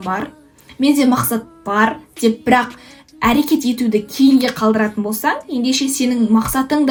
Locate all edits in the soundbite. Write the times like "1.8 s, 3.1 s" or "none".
none